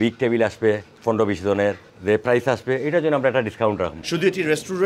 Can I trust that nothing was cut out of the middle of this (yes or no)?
no